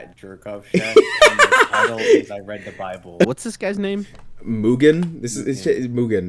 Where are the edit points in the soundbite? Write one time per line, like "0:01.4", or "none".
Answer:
0:03.3